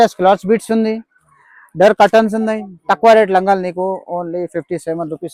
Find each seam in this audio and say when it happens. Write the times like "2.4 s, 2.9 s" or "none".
none